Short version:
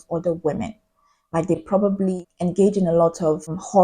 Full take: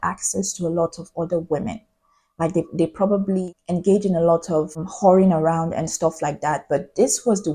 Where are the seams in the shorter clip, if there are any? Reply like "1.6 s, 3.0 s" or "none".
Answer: 1.6 s